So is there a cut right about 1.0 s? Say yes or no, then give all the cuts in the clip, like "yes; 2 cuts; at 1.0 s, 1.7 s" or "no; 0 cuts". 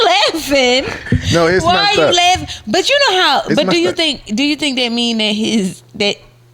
yes; 1 cut; at 1.0 s